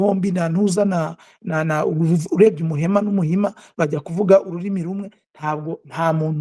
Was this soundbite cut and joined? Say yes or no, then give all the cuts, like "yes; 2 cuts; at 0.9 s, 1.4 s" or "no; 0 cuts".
no; 0 cuts